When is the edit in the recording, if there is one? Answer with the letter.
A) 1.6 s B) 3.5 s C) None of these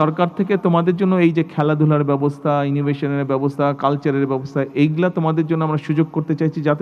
C